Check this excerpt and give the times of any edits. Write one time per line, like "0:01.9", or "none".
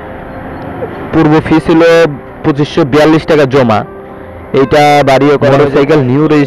0:05.5